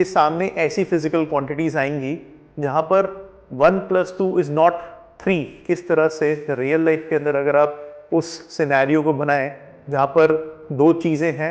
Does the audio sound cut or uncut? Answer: cut